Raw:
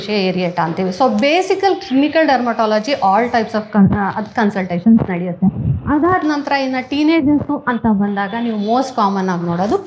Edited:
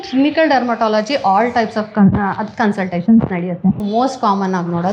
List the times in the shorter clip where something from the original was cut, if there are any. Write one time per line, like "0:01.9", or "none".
0:03.8

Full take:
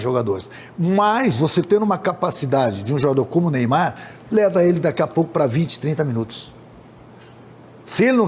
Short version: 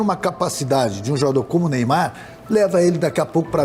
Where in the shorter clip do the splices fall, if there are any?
none

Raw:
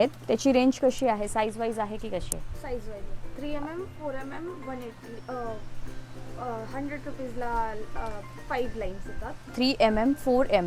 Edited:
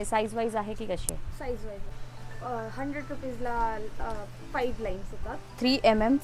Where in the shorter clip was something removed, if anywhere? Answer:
0:02.0

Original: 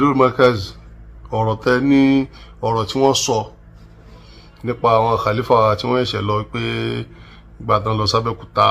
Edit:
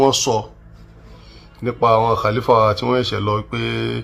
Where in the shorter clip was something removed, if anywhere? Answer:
none

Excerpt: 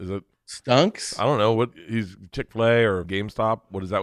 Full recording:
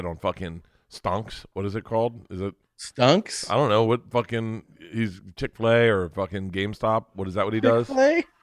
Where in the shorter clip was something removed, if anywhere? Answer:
0:01.7
0:03.1

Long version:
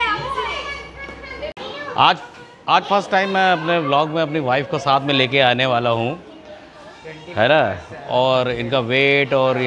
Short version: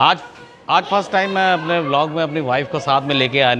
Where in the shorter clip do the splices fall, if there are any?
none

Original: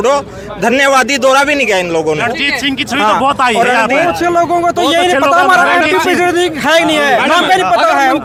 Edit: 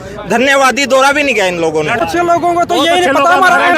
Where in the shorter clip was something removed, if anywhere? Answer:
0:02.0

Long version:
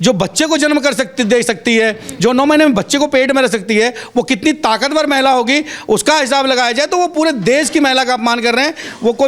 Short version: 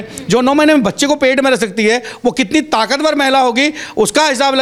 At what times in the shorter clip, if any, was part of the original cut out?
none

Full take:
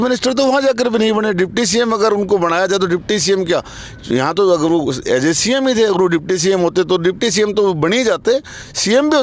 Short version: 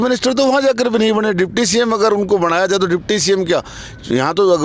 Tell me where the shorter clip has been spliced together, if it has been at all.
none

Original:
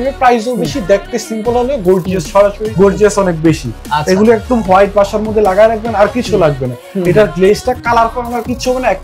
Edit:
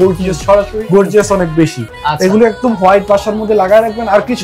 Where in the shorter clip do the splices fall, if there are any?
none

